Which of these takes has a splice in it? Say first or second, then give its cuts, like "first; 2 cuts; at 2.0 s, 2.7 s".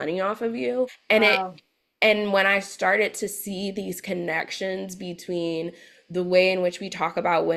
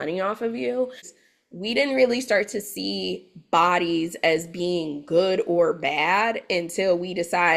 second; 1 cut; at 1.0 s